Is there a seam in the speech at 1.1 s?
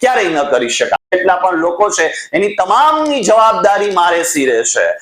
yes; 1 cut; at 1.1 s

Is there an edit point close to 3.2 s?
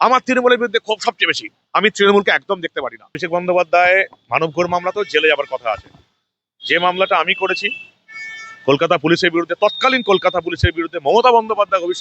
yes; 1 cut; at 3.2 s

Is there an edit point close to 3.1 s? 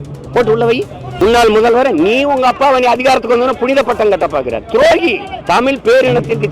no; 2 cuts; at 1.1 s, 5.3 s

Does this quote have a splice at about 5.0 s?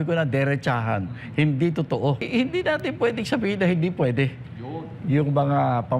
no; 1 cut; at 2.2 s

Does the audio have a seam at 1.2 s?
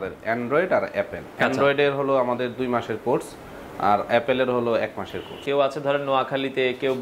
yes; 2 cuts; at 1.2 s, 5.4 s

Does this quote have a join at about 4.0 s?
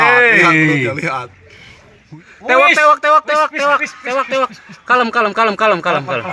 no; 1 cut; at 2.0 s

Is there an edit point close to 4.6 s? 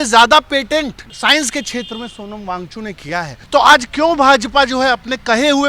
no; 2 cuts; at 1.1 s, 3.4 s

